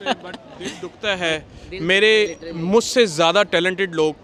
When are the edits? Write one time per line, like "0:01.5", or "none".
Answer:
none